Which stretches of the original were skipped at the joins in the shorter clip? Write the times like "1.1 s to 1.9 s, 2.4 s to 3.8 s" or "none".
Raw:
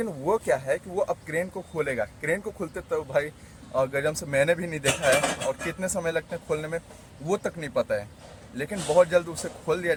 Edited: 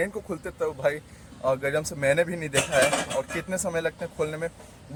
none